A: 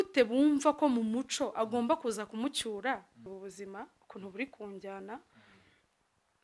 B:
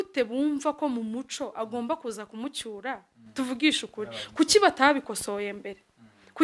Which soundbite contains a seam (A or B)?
A